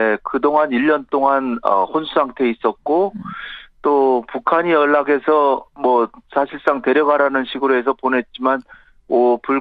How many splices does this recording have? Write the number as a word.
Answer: one